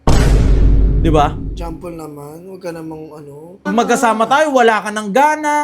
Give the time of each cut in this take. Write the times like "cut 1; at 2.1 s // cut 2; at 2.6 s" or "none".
cut 1; at 3.7 s

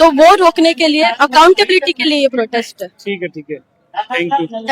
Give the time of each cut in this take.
none

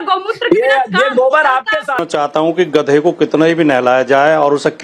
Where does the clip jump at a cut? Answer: cut 1; at 2.0 s

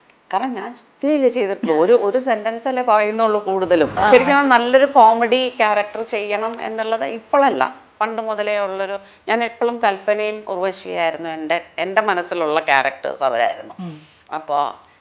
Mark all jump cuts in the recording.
cut 1; at 4.0 s

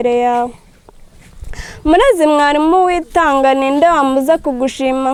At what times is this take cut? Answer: none

